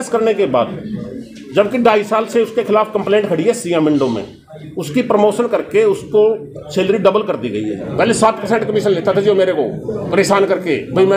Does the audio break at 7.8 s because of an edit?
yes; 1 cut; at 7.8 s

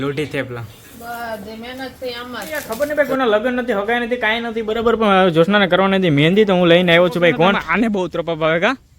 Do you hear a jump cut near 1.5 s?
no; 2 cuts; at 2.7 s, 7.6 s

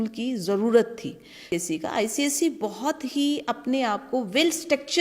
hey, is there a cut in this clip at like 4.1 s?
no; 1 cut; at 1.4 s

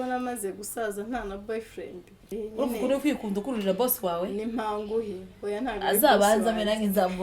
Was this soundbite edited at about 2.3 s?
yes; 1 cut; at 2.3 s

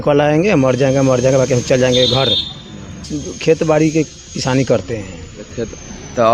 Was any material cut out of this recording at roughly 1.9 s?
no; 1 cut; at 3.2 s

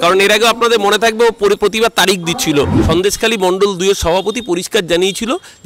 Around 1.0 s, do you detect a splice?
no; 1 cut; at 2.8 s

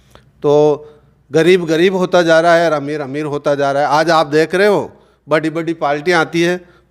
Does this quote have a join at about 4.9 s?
no; 0 cuts

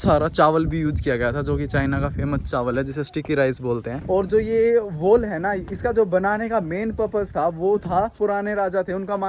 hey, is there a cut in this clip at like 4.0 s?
yes; 2 cuts; at 4.0 s, 8.2 s

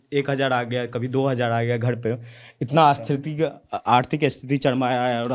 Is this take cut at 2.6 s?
no; 0 cuts

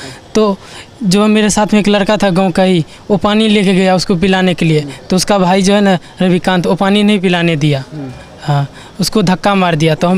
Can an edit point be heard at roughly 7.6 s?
no; 0 cuts

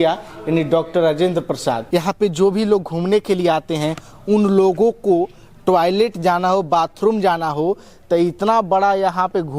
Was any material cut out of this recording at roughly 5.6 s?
no; 1 cut; at 1.8 s

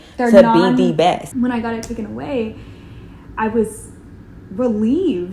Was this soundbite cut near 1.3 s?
yes; 1 cut; at 1.3 s

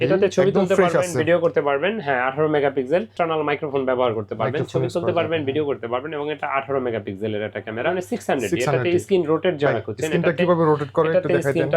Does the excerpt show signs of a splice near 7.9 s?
yes; 2 cuts; at 3.1 s, 7.9 s

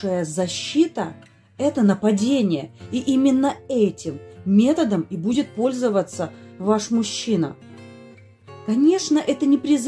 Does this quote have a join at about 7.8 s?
no; 0 cuts

